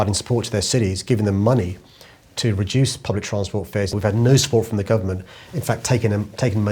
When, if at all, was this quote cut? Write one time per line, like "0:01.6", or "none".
0:03.9